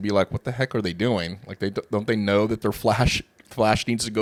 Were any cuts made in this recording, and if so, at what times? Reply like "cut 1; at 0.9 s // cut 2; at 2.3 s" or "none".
none